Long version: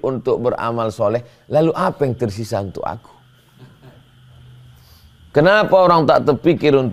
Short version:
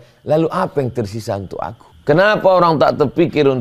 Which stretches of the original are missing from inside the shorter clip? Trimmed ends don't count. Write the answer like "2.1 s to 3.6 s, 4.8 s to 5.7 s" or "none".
3.1 s to 5.1 s